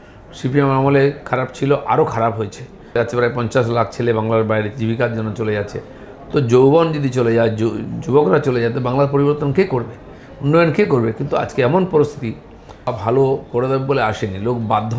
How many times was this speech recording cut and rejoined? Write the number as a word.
two